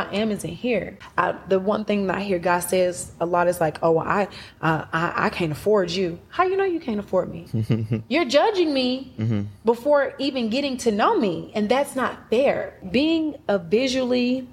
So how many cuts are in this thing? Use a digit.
3